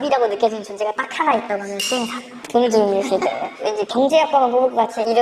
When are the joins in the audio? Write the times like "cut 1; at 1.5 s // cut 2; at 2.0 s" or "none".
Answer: none

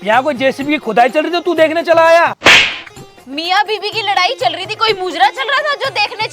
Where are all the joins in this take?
cut 1; at 2.4 s

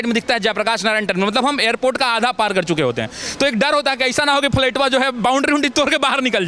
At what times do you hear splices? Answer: none

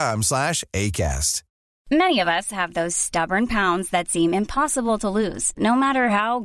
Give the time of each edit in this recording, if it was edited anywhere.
cut 1; at 1.8 s

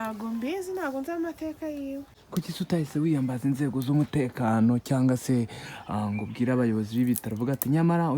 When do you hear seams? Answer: cut 1; at 2.2 s

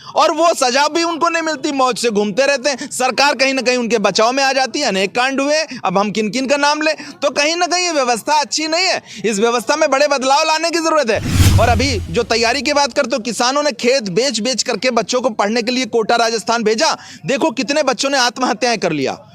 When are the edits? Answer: cut 1; at 11.3 s

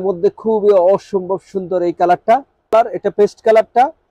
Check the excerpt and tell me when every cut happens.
cut 1; at 2.7 s

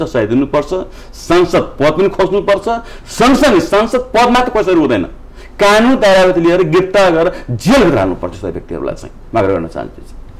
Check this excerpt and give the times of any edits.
none

